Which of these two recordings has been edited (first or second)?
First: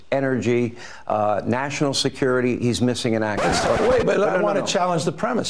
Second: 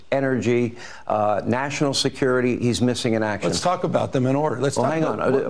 first